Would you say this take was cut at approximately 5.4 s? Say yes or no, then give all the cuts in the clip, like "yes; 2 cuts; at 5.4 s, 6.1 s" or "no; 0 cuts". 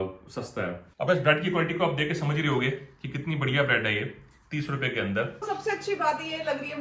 yes; 1 cut; at 5.4 s